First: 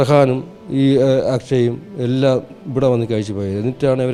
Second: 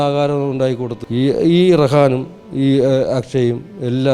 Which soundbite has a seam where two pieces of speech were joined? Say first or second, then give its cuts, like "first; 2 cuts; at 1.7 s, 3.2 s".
second; 1 cut; at 0.9 s